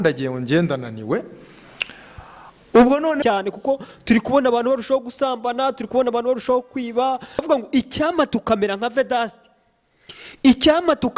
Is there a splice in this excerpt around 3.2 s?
yes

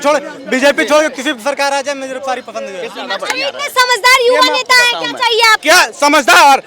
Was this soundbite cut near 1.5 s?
no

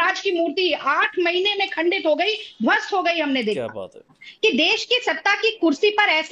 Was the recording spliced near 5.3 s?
no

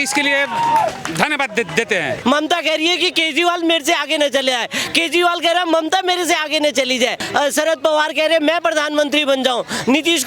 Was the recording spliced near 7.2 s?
yes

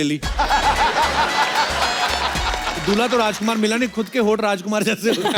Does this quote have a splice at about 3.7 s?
no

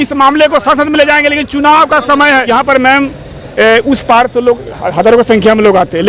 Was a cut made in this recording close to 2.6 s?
yes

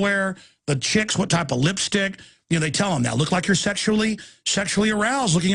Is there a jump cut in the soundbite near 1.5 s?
no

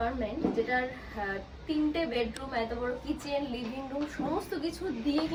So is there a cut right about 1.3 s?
no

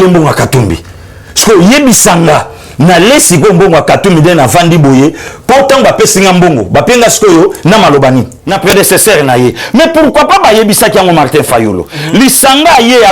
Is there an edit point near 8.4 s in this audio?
yes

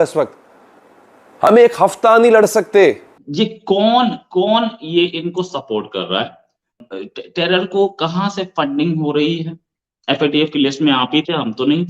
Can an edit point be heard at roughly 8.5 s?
no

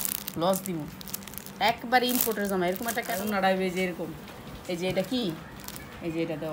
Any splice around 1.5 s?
no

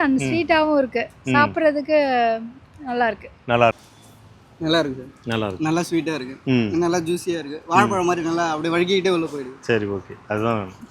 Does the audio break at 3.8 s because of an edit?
yes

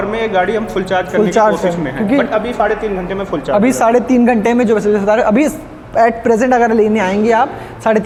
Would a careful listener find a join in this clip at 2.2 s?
no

